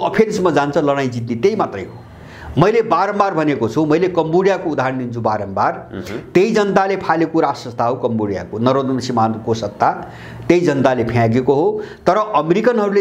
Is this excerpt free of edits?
yes; 0 cuts

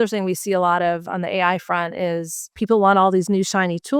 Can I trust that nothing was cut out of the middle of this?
no; 1 cut; at 2.6 s

